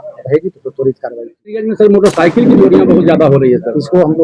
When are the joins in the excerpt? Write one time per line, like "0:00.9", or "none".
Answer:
0:01.6

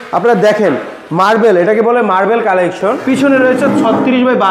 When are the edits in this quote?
0:03.0

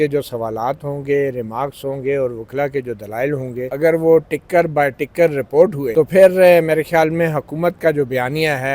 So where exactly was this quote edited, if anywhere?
0:03.7
0:05.8

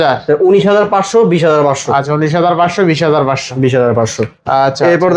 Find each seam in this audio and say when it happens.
none

